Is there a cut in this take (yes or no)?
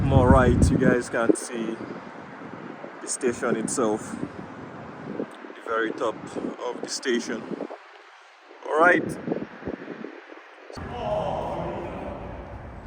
yes